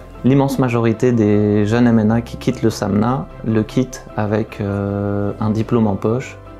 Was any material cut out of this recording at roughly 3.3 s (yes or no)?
no